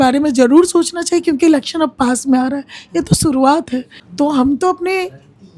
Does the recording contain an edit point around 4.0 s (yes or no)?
yes